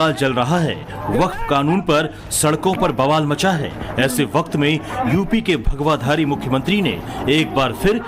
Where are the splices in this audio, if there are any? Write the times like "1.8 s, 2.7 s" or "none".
1.4 s